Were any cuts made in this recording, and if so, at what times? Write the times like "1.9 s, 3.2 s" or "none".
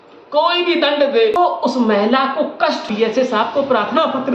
1.4 s, 2.9 s